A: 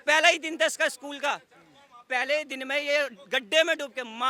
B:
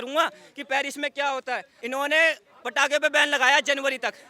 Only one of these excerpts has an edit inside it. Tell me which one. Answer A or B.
B